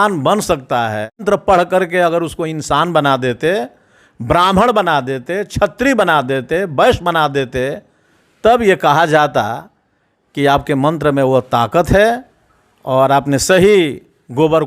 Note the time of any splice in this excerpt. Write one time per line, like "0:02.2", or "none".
0:01.2